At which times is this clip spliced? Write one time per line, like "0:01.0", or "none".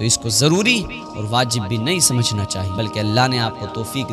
0:02.6